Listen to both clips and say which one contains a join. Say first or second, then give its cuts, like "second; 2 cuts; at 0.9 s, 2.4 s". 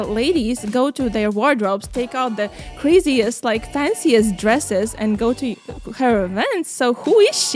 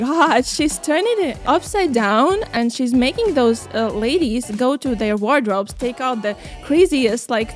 second; 2 cuts; at 1.4 s, 2.5 s